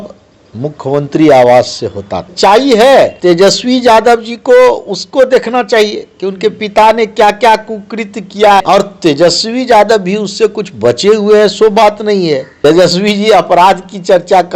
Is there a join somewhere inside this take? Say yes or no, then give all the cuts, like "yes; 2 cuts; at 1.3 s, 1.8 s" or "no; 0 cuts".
yes; 4 cuts; at 2.3 s, 3.2 s, 8.6 s, 12.5 s